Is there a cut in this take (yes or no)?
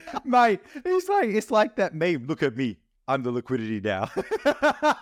no